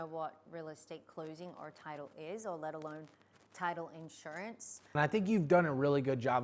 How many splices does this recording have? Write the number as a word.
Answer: one